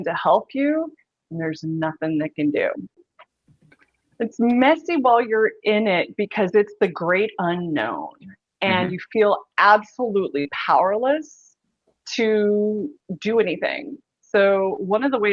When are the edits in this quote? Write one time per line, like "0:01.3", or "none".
0:02.9